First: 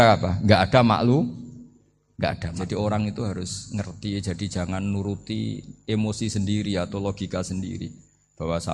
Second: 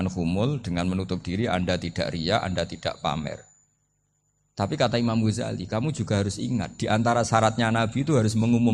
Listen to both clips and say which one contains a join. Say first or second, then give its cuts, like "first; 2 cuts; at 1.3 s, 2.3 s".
first; 1 cut; at 2.6 s